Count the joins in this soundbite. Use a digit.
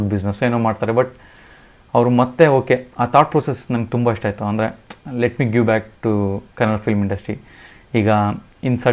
0